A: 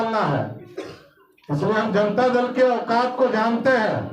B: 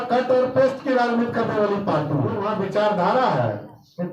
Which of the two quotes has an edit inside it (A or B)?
B